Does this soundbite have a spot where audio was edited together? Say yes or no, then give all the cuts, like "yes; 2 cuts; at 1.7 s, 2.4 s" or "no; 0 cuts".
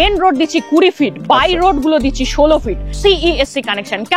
yes; 1 cut; at 3.0 s